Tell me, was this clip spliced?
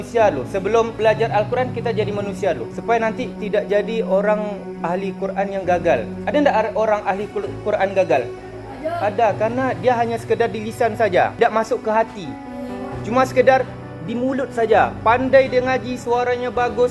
yes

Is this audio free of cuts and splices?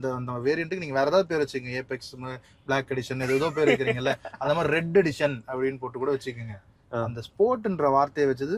yes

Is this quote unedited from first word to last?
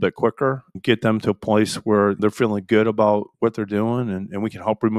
yes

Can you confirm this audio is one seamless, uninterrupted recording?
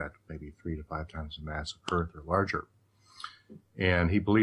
yes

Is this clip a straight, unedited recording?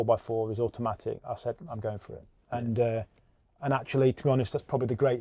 yes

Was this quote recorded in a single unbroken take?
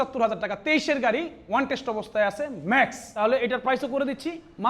no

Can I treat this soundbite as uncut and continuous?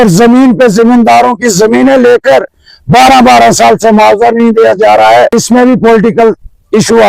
no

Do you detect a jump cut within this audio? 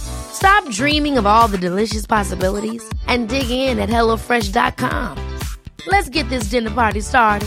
no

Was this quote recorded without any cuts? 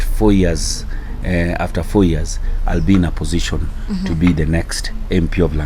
yes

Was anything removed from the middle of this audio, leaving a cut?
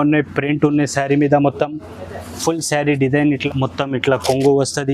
yes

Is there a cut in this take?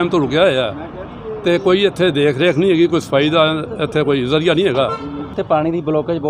yes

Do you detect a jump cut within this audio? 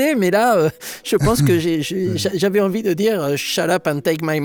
no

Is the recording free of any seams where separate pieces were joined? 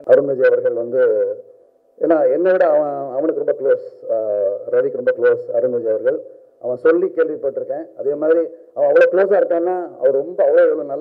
yes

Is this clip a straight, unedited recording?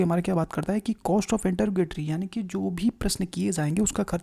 yes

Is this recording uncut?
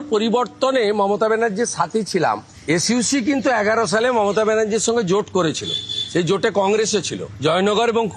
yes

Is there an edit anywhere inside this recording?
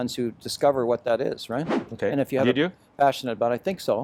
no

